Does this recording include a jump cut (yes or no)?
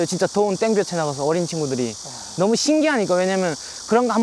no